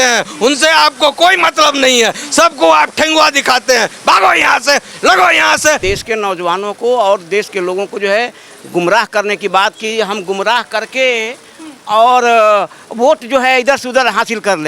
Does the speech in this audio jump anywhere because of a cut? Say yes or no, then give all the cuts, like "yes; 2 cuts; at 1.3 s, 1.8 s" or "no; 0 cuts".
yes; 1 cut; at 5.8 s